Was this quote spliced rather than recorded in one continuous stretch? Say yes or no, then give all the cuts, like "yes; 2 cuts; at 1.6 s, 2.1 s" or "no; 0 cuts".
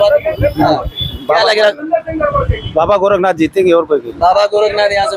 no; 0 cuts